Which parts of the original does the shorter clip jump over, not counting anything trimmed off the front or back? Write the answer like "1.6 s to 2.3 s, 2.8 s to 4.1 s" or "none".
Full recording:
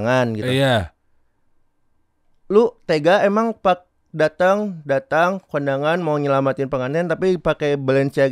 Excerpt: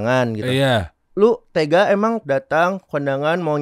1.0 s to 2.3 s, 3.5 s to 4.8 s

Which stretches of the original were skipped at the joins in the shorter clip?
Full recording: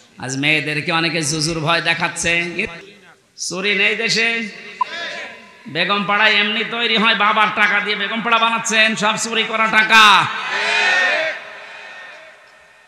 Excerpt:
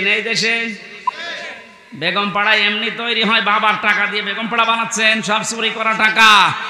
none

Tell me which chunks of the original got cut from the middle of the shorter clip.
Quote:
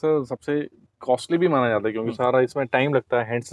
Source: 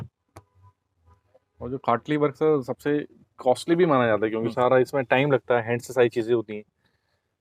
none

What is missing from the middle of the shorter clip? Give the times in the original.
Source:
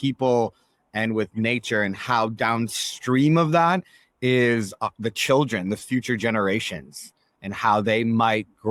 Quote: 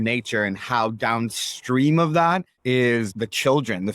4.2 s to 4.6 s

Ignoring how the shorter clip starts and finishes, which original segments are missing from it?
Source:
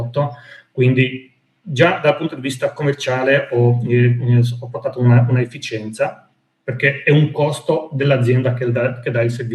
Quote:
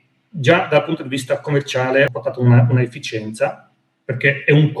3.5 s to 4.7 s

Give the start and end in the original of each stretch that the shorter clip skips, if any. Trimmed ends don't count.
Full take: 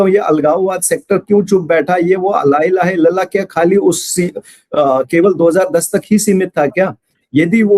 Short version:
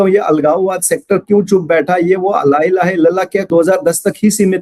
3.5 s to 5.4 s

